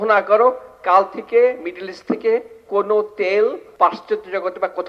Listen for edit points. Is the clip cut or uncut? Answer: cut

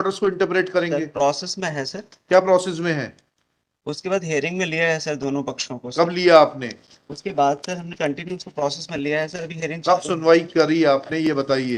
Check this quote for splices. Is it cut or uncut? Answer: uncut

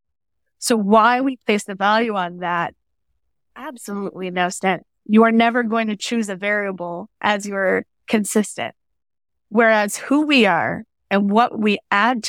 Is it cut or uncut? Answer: uncut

